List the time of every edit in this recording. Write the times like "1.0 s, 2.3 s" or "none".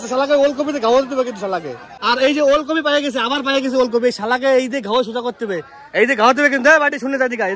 1.9 s